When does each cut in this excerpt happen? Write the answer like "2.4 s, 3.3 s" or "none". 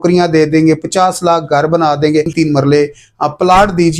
2.3 s